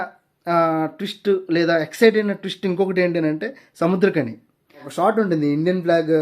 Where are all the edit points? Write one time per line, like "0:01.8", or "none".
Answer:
0:04.9